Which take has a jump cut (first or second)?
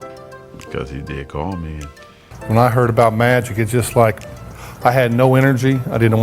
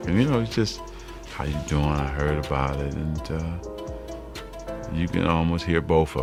first